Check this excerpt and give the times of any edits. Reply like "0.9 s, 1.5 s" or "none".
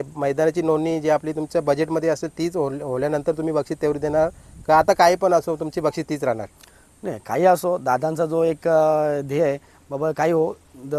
none